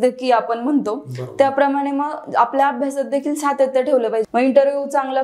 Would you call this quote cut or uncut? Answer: cut